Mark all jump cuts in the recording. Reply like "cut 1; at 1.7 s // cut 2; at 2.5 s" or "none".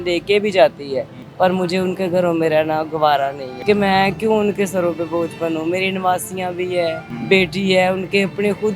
cut 1; at 1.2 s // cut 2; at 3.5 s // cut 3; at 7.1 s